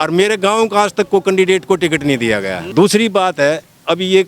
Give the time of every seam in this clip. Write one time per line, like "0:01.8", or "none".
none

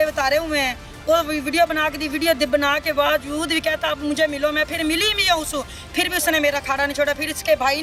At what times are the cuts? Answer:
none

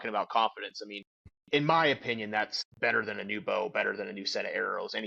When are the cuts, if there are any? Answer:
0:01.0
0:02.6

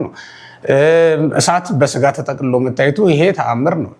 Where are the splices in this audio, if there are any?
none

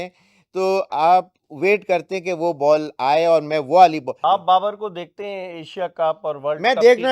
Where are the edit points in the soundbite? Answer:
0:04.2

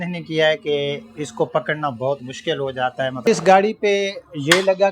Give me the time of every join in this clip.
0:03.2

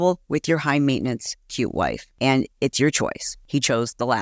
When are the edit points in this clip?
0:02.1
0:03.3

